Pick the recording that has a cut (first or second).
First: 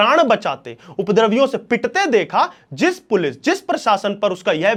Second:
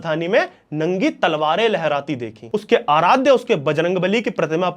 second